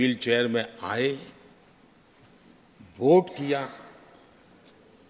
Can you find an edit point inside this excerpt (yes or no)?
no